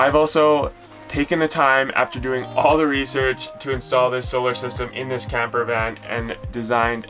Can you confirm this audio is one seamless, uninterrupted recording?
yes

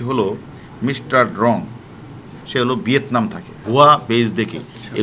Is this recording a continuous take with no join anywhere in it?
no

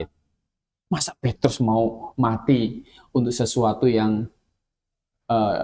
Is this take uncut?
yes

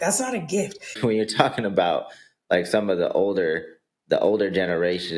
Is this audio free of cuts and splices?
no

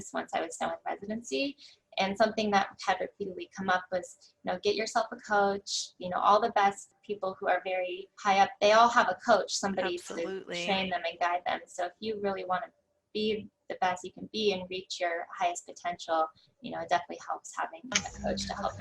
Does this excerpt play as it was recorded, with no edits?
no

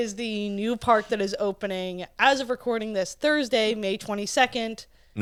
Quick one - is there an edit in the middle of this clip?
no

